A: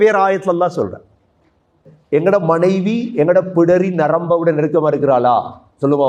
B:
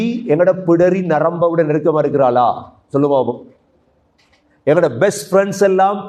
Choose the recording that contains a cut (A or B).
A